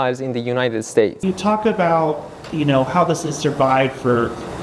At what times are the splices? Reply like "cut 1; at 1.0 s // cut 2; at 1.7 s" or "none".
cut 1; at 1.2 s